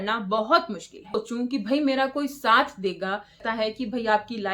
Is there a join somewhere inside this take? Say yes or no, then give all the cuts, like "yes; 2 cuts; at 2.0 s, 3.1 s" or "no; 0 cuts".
yes; 2 cuts; at 1.2 s, 3.4 s